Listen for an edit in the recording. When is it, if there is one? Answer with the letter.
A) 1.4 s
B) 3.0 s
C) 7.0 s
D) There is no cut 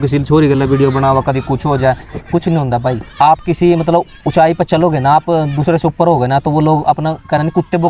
D